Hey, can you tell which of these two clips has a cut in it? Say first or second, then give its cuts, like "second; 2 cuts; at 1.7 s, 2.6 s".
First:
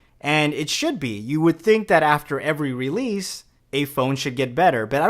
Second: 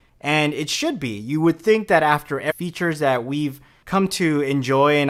first; 1 cut; at 2.6 s